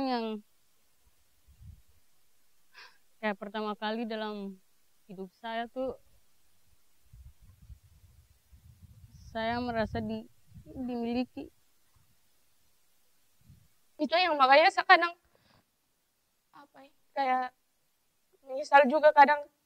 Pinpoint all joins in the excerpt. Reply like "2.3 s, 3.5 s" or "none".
14.0 s